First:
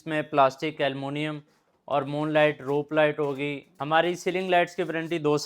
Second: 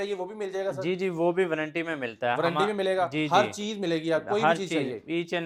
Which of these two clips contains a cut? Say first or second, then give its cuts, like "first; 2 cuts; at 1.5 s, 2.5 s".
first; 1 cut; at 3.7 s